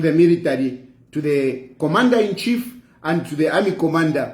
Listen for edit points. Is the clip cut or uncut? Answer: uncut